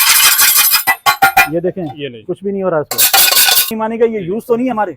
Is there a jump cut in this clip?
yes; 1 cut; at 3.7 s

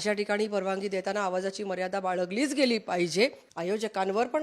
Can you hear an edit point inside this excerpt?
yes; 1 cut; at 3.5 s

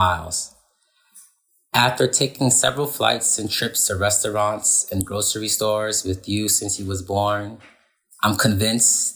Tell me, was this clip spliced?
no; 0 cuts

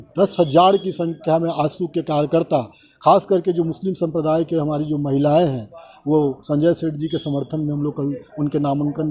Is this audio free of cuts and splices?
yes; 0 cuts

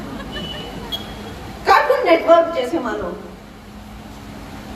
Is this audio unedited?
yes; 0 cuts

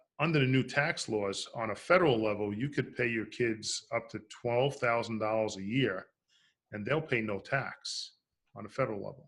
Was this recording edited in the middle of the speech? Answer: no; 0 cuts

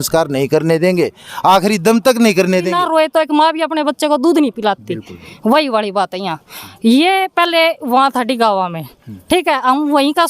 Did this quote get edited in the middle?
yes; 1 cut; at 2.8 s

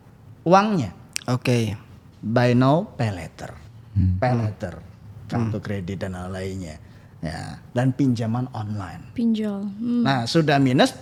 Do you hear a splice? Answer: no; 0 cuts

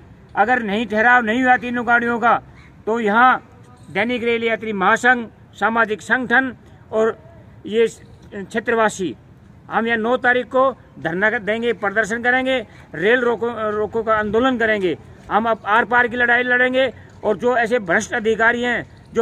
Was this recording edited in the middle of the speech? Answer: no; 0 cuts

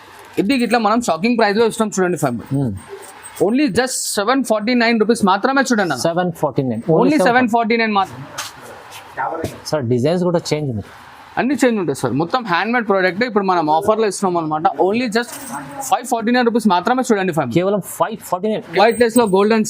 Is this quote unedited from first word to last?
no; 2 cuts; at 8.1 s, 18.7 s

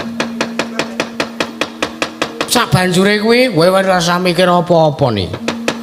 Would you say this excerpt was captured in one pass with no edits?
yes; 0 cuts

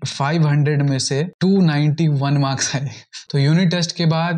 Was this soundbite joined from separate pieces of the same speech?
yes; 2 cuts; at 1.3 s, 3.3 s

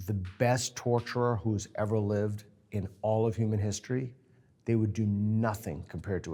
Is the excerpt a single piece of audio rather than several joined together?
yes; 0 cuts

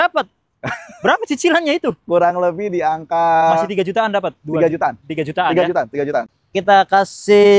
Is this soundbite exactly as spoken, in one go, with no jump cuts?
no; 1 cut; at 6.3 s

